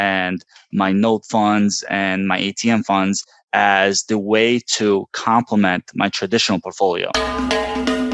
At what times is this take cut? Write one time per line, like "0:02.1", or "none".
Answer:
0:07.1